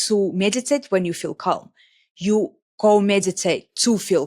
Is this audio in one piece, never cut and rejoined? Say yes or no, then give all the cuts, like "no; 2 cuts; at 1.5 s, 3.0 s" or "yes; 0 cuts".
yes; 0 cuts